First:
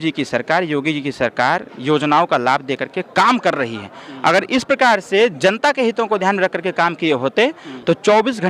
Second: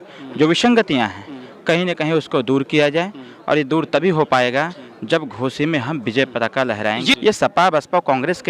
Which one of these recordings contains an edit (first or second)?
second